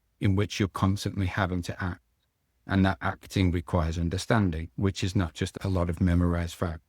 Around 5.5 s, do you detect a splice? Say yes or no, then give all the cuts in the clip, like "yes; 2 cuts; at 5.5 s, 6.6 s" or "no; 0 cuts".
yes; 1 cut; at 5.5 s